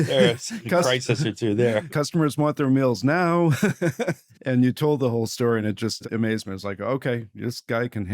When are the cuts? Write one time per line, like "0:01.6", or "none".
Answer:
0:01.9
0:04.3
0:06.0